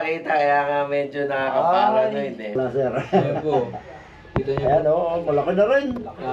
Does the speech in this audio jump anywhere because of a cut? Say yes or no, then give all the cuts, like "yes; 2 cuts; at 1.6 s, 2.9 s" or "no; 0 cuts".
yes; 1 cut; at 2.5 s